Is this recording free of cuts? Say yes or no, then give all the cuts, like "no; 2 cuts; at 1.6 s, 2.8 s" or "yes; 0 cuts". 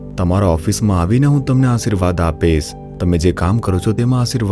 yes; 0 cuts